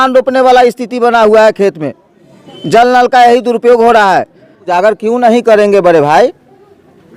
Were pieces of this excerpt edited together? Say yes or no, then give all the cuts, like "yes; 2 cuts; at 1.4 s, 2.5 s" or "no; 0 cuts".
yes; 1 cut; at 4.6 s